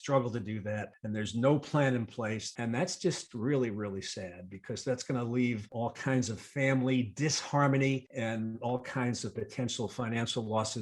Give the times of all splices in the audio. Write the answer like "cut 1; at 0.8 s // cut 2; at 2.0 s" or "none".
cut 1; at 0.9 s // cut 2; at 2.5 s // cut 3; at 5.7 s // cut 4; at 8.1 s